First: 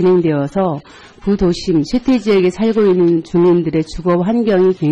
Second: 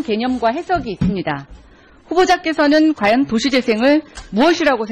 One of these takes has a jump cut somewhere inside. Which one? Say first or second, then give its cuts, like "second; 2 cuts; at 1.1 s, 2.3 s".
second; 1 cut; at 3.3 s